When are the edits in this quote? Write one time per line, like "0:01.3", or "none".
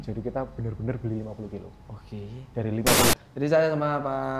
0:03.1

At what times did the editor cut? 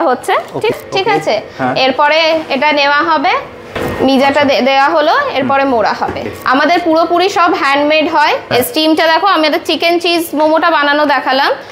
0:00.7
0:03.7
0:06.3
0:08.4

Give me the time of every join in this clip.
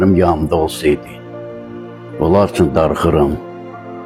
none

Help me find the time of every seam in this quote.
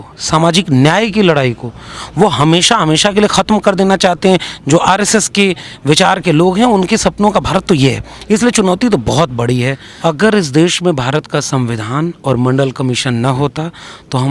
0:09.9

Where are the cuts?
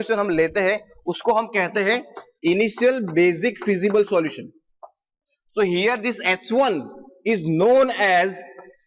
0:05.1

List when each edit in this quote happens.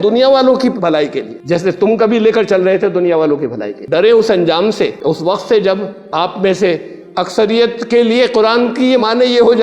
0:06.0

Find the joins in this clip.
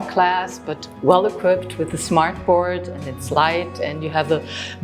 none

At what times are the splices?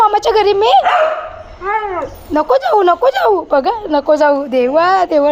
none

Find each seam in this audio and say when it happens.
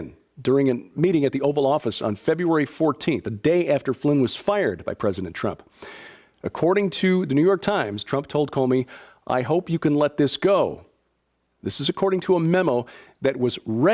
0:03.1

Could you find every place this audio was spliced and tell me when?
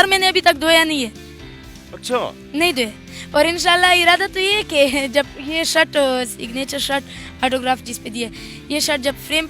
none

